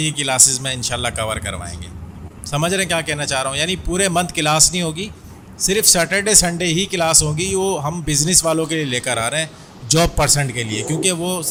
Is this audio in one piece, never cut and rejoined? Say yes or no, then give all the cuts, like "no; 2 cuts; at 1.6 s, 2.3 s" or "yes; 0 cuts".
yes; 0 cuts